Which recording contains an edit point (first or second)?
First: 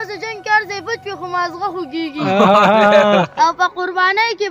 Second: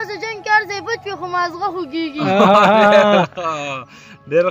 first